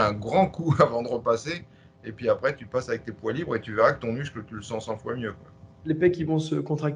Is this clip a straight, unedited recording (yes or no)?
yes